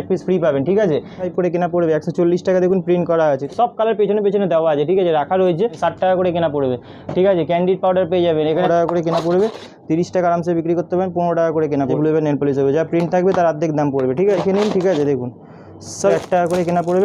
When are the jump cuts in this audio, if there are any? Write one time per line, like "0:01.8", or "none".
0:01.3
0:03.4
0:05.8
0:08.7
0:11.9
0:14.4
0:16.1